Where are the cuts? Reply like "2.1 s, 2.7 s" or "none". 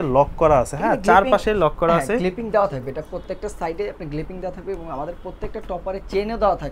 none